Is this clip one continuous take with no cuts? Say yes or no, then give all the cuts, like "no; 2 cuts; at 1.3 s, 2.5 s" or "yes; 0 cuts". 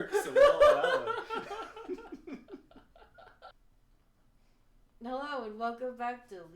no; 1 cut; at 3.5 s